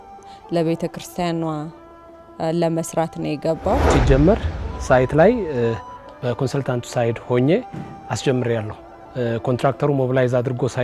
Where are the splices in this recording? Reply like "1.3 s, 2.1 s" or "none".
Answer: 3.9 s